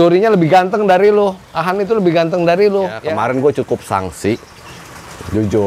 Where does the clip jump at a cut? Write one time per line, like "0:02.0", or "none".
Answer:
0:03.0